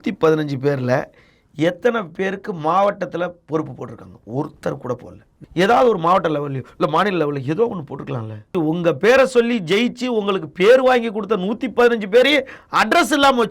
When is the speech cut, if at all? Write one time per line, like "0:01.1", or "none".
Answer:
0:05.4
0:08.5